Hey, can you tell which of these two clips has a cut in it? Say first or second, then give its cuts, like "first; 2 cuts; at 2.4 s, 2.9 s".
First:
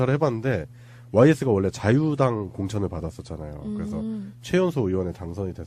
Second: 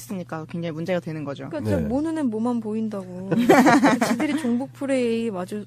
second; 1 cut; at 1.5 s